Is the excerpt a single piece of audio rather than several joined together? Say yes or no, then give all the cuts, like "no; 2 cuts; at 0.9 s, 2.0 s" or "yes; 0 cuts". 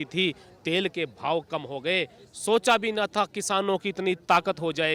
yes; 0 cuts